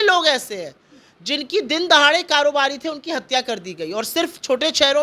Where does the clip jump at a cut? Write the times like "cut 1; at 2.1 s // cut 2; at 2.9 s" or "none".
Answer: none